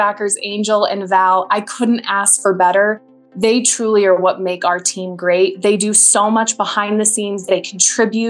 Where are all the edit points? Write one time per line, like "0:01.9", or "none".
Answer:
0:07.4